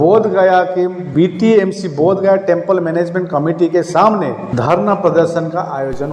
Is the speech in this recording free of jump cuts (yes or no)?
no